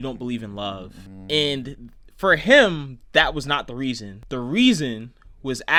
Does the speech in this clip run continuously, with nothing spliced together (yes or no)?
yes